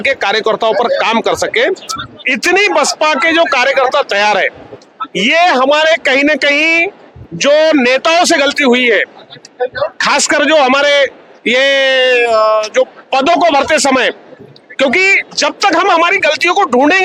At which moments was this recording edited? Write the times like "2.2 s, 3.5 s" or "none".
none